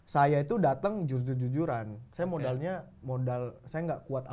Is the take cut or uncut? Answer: uncut